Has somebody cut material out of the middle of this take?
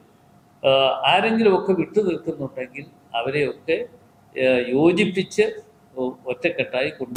no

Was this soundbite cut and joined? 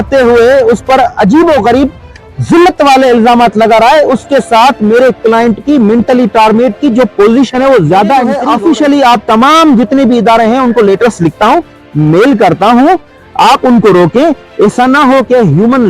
yes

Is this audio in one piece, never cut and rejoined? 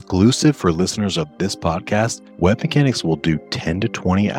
no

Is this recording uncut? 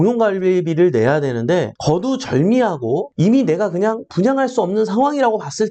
no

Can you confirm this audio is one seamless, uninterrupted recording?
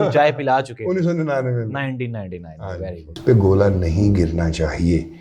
no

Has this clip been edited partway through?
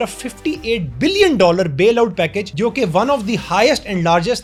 no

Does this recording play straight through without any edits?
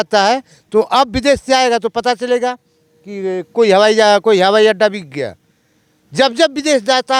yes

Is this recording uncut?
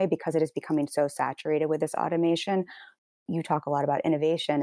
yes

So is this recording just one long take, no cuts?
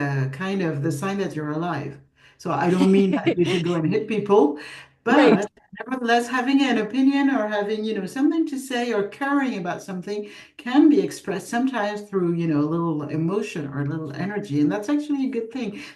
yes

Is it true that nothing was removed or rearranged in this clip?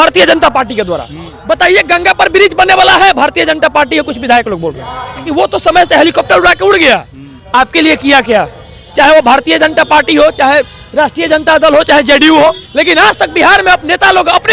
no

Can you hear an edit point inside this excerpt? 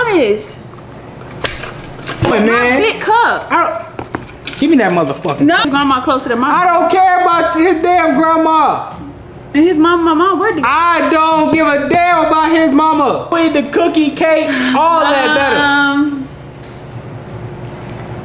yes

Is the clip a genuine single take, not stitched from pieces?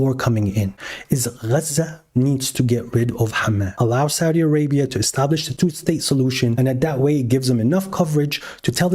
no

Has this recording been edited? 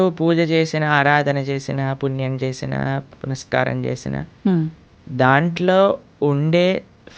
no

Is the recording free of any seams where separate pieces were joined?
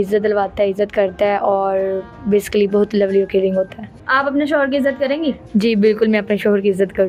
yes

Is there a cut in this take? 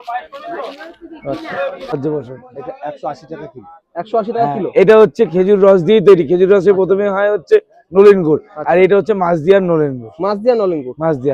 yes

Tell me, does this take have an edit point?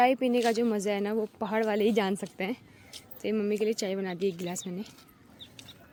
no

